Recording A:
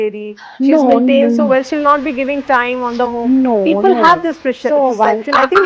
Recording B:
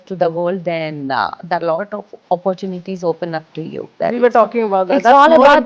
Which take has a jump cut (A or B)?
B